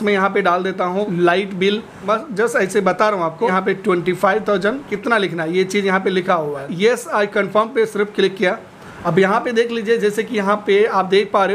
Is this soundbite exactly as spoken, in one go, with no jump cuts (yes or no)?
no